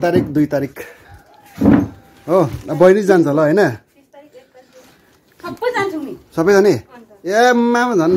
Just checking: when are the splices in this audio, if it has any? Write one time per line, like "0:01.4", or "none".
none